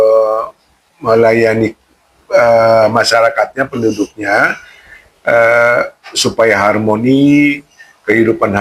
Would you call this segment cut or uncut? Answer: uncut